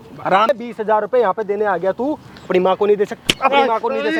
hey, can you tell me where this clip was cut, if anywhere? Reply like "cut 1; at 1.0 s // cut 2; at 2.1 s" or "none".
none